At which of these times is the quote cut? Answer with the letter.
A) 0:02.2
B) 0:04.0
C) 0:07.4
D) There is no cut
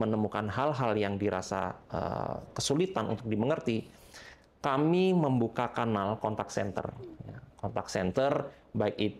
D